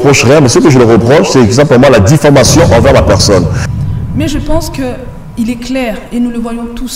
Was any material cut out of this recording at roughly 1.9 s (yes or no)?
no